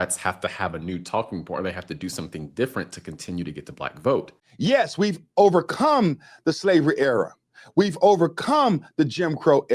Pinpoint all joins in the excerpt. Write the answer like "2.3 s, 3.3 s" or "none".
4.4 s